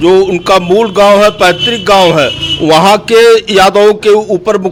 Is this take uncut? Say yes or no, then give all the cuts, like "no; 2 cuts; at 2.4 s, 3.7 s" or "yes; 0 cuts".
yes; 0 cuts